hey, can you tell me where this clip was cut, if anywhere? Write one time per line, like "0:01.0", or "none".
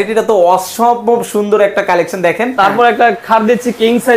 0:02.5